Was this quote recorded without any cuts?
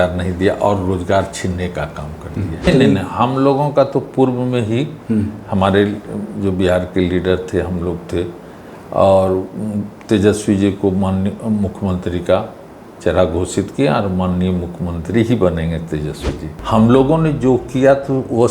no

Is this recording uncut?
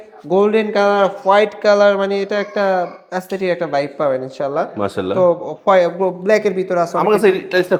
yes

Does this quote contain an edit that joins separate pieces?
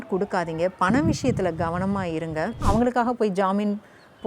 yes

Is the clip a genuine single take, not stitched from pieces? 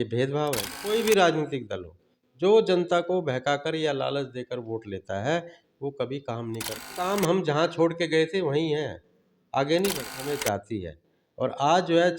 no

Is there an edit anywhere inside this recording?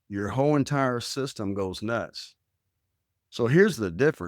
no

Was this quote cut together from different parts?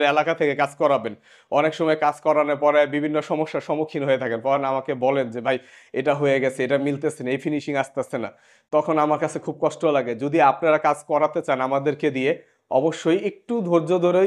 no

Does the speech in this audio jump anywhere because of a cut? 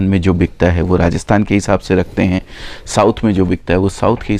no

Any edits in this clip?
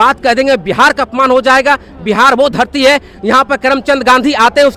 no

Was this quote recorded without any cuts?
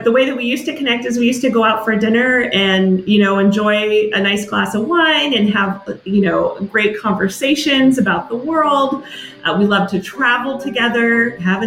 yes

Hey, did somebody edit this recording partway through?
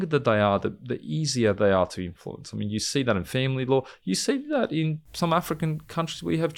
yes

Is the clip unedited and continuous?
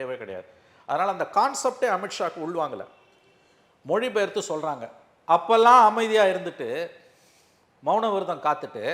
yes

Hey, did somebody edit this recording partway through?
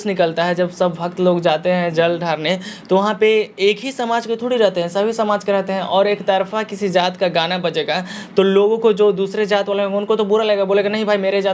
no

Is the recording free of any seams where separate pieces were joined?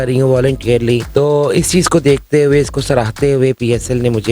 no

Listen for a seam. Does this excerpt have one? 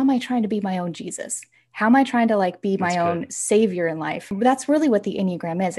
yes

